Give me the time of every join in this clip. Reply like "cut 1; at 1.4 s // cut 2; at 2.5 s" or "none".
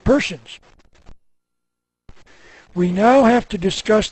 cut 1; at 3.0 s